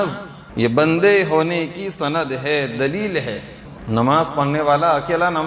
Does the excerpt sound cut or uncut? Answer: cut